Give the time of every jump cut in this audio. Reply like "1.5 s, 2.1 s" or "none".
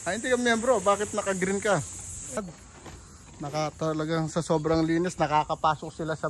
2.4 s